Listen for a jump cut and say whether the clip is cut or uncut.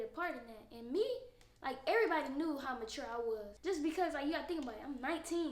cut